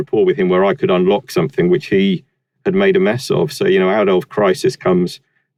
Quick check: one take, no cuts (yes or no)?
yes